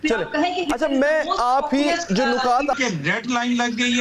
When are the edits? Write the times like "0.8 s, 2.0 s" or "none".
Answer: 2.7 s